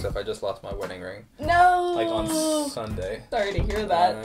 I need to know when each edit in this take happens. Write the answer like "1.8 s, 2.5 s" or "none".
3.2 s